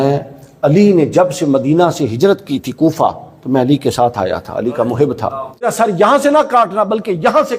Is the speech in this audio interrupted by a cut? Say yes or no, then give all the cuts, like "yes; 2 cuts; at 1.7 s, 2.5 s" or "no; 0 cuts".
yes; 1 cut; at 5.7 s